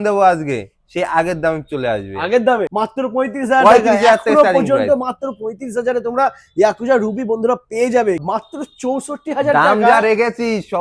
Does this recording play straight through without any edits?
no; 2 cuts; at 2.7 s, 8.2 s

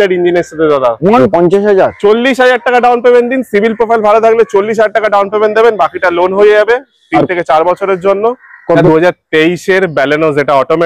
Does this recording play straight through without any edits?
no; 2 cuts; at 1.2 s, 8.8 s

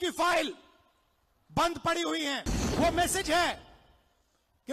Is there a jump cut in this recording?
yes; 1 cut; at 2.6 s

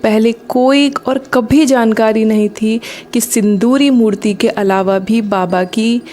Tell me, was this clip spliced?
no; 0 cuts

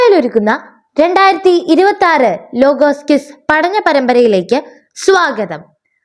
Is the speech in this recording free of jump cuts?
yes; 0 cuts

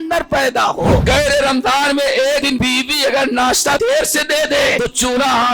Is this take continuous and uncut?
no; 4 cuts; at 1.0 s, 2.5 s, 3.8 s, 4.8 s

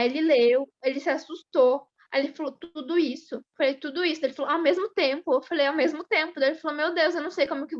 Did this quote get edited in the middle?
no; 0 cuts

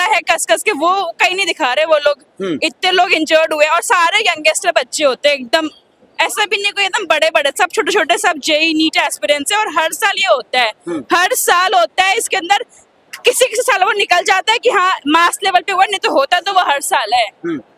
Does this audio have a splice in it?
no; 0 cuts

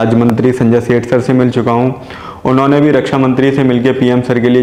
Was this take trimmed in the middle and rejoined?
no; 0 cuts

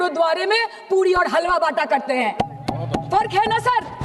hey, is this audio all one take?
yes; 0 cuts

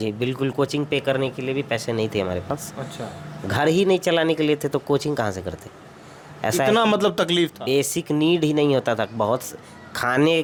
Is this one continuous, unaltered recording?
yes; 0 cuts

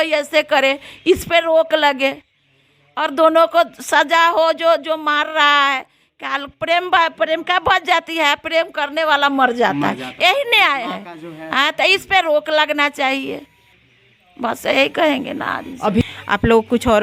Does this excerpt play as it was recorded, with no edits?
no; 1 cut; at 16.0 s

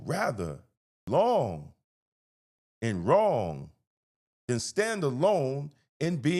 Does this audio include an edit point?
yes; 1 cut; at 1.1 s

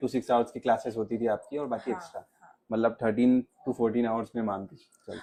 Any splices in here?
no; 0 cuts

